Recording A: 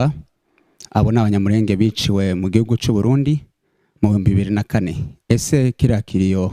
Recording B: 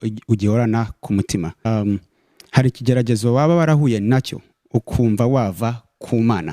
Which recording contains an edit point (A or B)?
B